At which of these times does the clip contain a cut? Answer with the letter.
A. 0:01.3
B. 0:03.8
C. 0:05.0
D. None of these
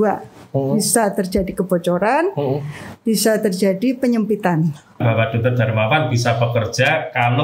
C